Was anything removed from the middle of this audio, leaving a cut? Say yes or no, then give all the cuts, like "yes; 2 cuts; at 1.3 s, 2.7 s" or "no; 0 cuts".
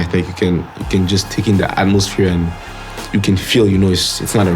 no; 0 cuts